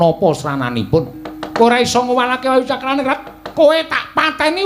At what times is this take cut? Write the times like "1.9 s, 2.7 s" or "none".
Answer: 3.3 s